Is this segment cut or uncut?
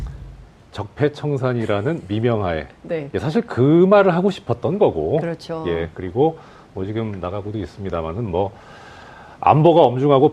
uncut